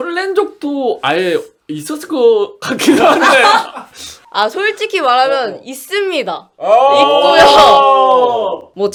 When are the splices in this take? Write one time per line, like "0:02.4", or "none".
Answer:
none